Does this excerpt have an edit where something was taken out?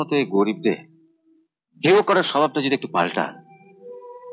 no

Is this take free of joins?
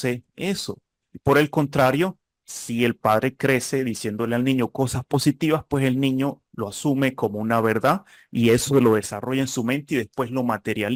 yes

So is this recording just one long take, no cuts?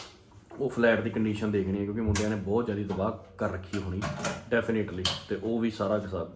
yes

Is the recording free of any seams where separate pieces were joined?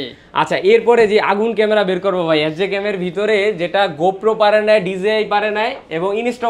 yes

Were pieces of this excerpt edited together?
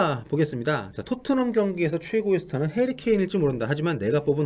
no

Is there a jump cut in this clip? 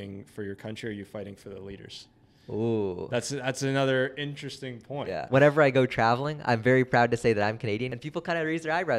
yes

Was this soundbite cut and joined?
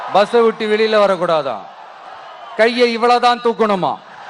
no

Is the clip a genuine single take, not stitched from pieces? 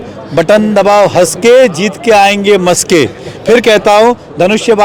yes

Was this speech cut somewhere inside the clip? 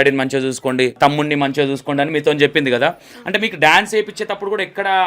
yes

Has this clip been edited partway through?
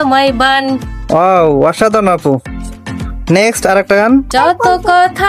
yes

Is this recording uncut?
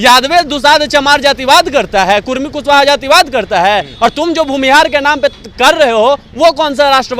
yes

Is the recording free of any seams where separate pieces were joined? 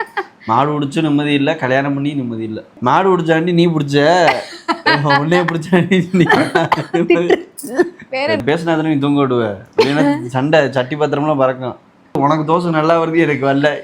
no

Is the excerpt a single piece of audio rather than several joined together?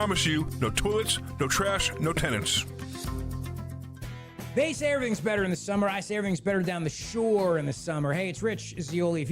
no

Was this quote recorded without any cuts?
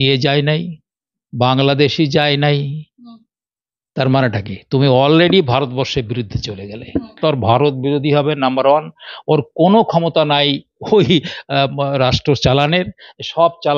no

